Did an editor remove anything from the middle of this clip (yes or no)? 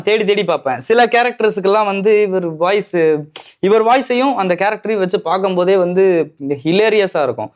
no